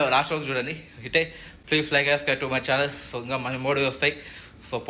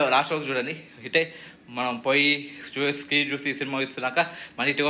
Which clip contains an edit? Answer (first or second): first